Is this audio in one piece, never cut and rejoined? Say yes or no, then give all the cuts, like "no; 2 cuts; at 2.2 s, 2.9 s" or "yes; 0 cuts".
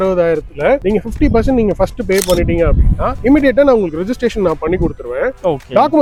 yes; 0 cuts